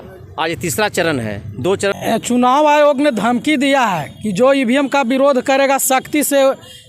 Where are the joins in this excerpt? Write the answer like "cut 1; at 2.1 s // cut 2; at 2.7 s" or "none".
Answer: cut 1; at 1.9 s